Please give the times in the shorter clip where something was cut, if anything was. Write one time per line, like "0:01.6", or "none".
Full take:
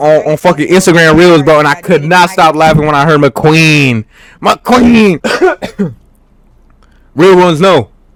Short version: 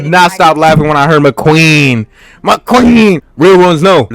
0:03.2